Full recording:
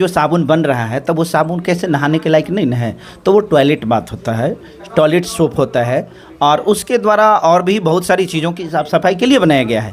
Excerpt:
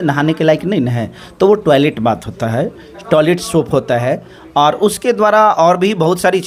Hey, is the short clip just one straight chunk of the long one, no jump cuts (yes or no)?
yes